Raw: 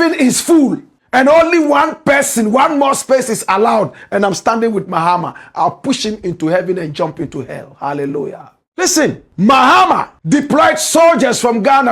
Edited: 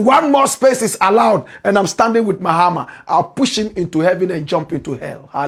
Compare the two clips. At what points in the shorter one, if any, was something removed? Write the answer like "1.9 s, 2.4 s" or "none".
none